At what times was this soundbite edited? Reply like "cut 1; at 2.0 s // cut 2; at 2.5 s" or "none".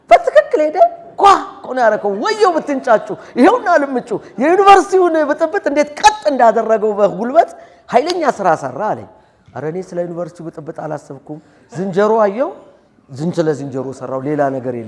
none